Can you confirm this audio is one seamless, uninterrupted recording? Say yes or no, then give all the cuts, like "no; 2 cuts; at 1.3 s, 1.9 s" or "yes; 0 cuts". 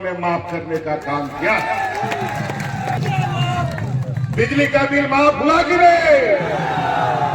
no; 1 cut; at 3.0 s